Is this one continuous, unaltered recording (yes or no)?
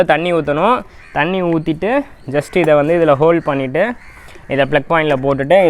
yes